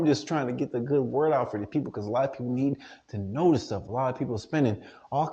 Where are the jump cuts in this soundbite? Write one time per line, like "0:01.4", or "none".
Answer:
none